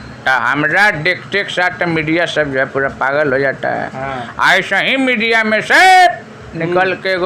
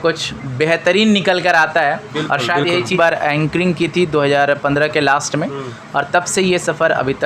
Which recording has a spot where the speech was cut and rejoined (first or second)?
second